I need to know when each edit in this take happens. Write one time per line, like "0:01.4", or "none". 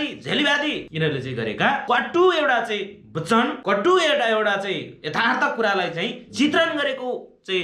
0:00.9
0:01.8
0:03.6